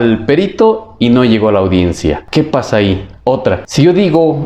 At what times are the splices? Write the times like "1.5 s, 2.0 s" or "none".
2.2 s, 3.7 s